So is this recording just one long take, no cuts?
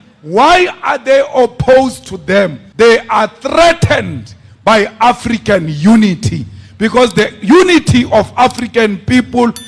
no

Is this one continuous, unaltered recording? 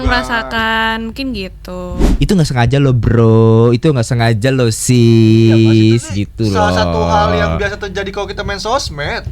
no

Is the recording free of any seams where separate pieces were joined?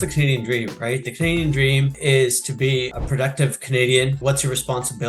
no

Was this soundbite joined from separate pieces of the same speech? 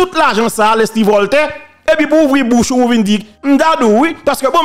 yes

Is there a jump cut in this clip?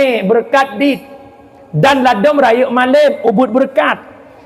no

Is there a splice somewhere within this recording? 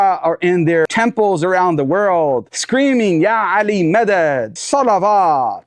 yes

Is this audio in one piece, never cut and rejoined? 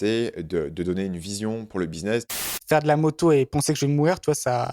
no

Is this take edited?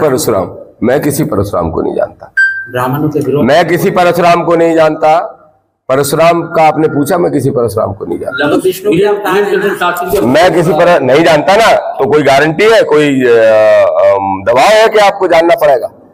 no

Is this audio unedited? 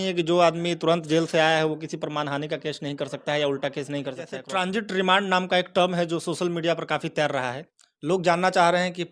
no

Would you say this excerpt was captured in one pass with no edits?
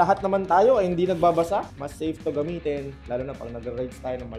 no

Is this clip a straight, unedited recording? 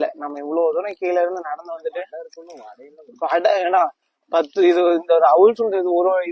yes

